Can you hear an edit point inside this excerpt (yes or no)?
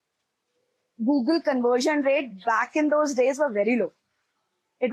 no